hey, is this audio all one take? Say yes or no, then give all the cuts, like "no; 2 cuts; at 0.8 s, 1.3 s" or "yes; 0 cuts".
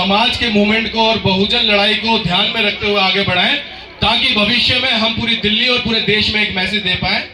yes; 0 cuts